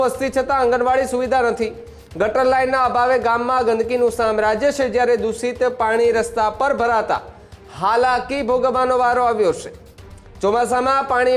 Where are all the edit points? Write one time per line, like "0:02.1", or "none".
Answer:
none